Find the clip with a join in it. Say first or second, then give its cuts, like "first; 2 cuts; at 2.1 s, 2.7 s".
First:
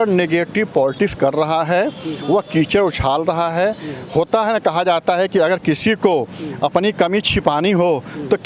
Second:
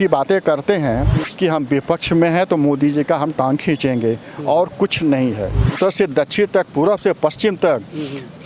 second; 2 cuts; at 1.2 s, 5.7 s